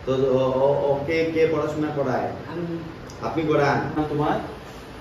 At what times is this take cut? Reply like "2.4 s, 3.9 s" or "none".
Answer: 3.9 s

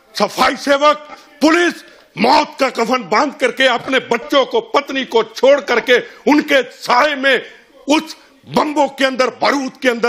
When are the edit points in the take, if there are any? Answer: none

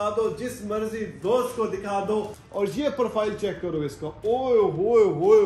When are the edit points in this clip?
2.4 s

